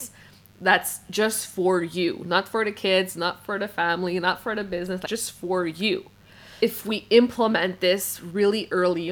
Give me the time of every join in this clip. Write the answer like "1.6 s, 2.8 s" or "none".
5.0 s, 6.6 s